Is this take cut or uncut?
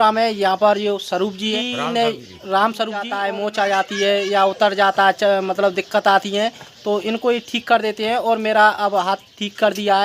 cut